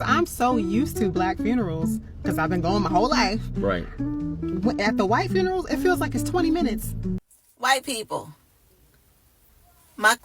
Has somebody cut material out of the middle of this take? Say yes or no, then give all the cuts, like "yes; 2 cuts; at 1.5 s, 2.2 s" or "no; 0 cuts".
yes; 1 cut; at 7.3 s